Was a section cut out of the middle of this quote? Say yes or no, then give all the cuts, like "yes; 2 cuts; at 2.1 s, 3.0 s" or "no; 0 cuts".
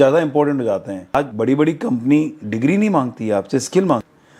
yes; 1 cut; at 1.1 s